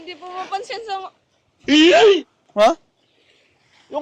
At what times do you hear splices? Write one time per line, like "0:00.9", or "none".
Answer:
0:01.1
0:02.3